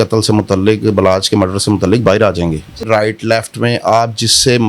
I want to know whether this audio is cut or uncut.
cut